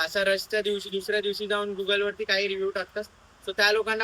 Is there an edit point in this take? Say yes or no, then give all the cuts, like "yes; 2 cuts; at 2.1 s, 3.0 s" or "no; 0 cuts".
no; 0 cuts